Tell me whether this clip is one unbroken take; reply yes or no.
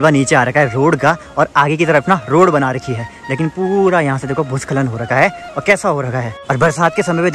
yes